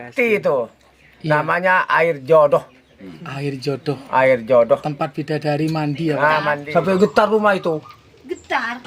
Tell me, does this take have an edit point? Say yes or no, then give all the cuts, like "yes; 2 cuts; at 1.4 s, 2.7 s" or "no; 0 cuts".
yes; 1 cut; at 6.6 s